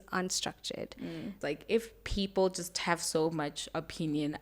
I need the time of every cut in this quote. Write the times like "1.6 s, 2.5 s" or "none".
1.4 s